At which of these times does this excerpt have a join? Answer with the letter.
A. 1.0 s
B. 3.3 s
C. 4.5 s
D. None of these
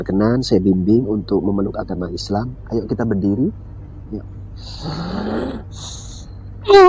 D